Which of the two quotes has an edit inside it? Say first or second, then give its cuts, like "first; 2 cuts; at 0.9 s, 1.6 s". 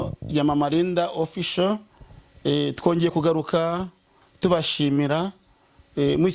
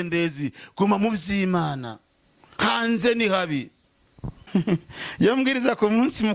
second; 1 cut; at 4.5 s